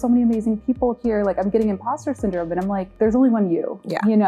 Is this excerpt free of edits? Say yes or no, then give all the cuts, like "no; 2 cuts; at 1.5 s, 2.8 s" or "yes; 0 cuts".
no; 1 cut; at 2.9 s